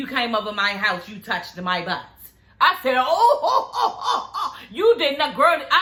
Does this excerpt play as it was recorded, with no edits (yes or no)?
yes